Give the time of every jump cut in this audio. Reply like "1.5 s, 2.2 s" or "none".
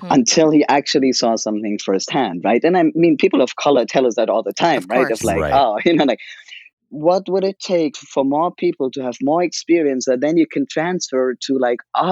6.7 s, 8.0 s